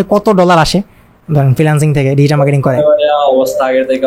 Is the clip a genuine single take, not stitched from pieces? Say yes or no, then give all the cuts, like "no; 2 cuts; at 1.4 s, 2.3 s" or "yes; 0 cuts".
yes; 0 cuts